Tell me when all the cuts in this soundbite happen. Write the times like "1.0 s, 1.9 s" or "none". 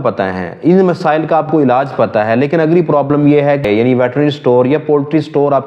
3.6 s

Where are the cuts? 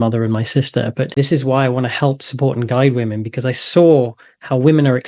1.1 s

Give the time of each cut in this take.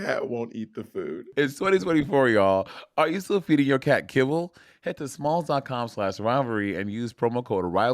1.2 s

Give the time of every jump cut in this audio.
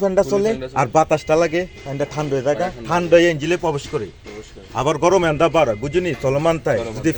none

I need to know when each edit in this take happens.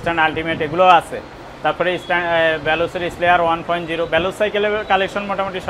none

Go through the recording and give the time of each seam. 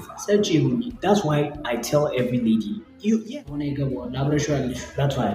3.4 s

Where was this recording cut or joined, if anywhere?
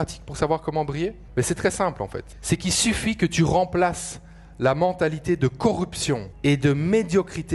1.2 s, 2.3 s, 6.3 s

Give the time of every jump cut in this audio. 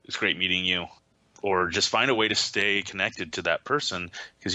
1.0 s

